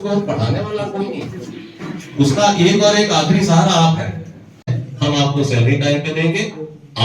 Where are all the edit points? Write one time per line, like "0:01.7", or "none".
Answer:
0:04.8